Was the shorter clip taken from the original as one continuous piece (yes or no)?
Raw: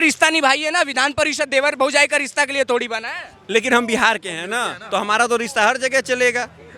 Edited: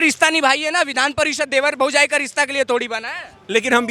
yes